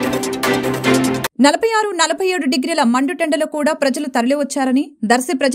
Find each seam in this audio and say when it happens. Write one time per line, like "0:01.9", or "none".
none